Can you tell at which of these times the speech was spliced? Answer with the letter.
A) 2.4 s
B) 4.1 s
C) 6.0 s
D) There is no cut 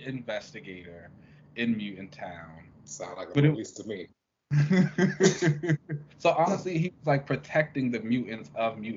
C